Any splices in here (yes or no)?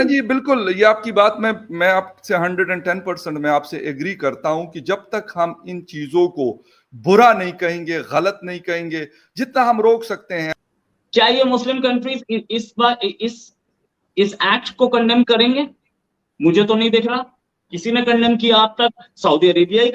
yes